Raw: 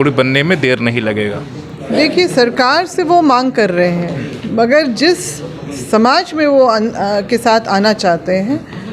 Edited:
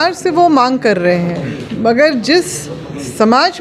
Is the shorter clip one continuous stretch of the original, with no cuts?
yes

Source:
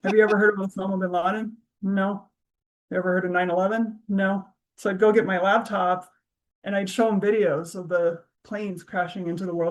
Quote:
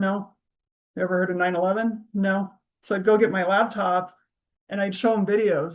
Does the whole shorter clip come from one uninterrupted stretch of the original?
yes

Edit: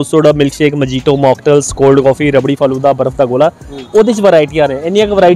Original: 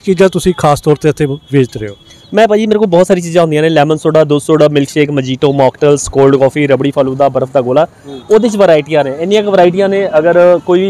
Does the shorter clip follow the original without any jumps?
yes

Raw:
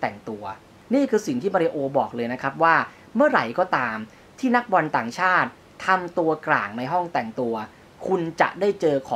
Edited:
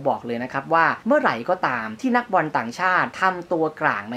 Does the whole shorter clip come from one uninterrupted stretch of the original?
no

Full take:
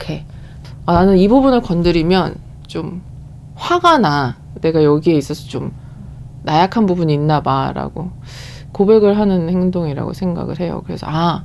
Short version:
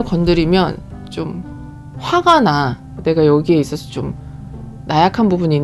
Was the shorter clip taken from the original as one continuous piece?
yes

